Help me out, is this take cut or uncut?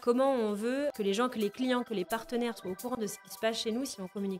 cut